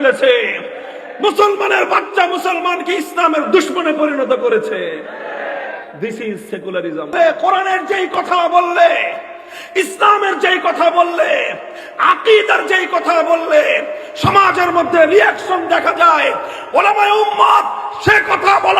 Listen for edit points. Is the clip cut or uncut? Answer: cut